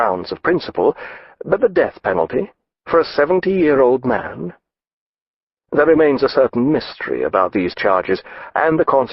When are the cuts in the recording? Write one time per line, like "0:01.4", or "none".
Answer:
0:05.9

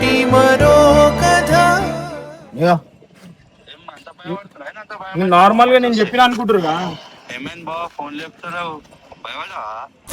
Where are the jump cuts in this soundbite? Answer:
0:02.2

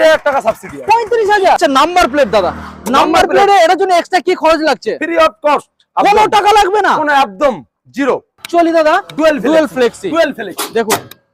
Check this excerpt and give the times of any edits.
0:01.6
0:08.4

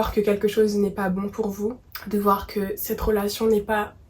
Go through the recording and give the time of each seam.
0:01.9

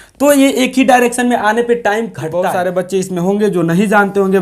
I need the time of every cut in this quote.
0:02.2

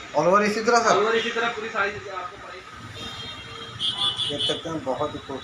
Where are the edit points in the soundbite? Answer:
0:02.3

